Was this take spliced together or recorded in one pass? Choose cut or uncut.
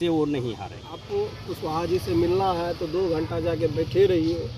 cut